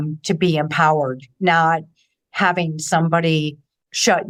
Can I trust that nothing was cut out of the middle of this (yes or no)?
yes